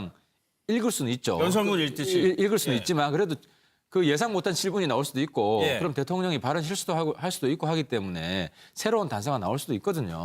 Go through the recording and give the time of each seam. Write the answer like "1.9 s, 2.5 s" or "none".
8.1 s

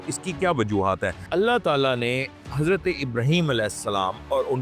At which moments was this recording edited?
1.2 s

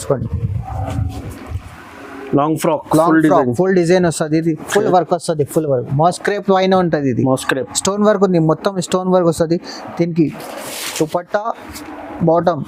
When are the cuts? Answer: none

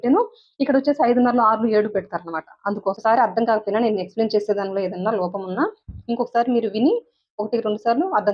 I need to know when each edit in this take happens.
3.0 s

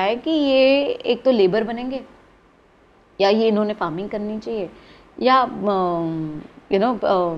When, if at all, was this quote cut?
none

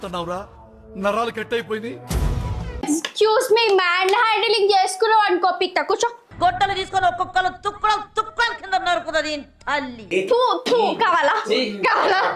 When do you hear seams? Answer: 2.8 s, 10.1 s

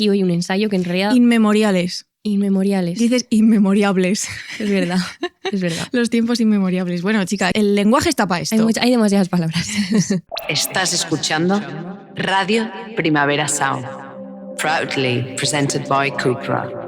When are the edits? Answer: 7.5 s, 10.2 s

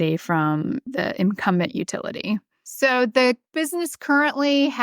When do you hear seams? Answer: 0.9 s, 2.6 s, 3.5 s

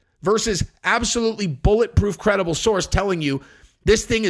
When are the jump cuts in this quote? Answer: none

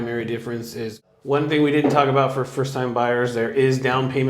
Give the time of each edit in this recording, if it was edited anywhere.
1.0 s

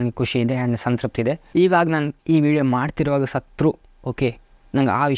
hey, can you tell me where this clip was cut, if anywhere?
1.4 s

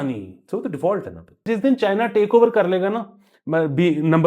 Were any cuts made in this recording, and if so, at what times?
1.4 s

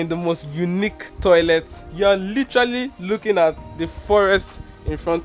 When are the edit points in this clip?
1.1 s, 1.8 s

